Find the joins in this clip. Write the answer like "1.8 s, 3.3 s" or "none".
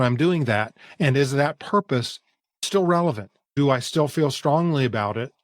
2.6 s, 3.6 s